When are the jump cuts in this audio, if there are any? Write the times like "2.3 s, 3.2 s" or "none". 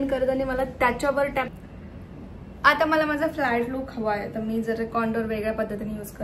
1.5 s